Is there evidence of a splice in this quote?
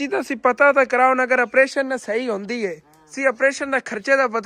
no; 0 cuts

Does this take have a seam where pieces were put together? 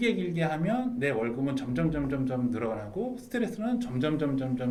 no; 0 cuts

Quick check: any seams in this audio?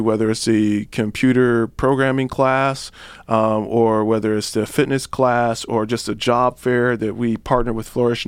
no; 0 cuts

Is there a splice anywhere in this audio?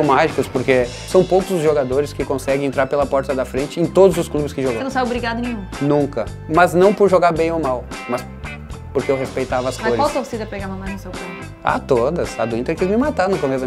yes; 1 cut; at 1.0 s

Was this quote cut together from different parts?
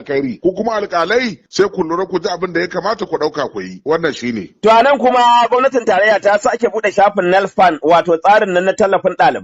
no; 0 cuts

